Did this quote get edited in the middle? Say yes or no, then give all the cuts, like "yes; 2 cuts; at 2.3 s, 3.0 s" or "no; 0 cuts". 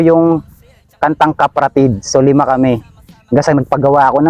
no; 0 cuts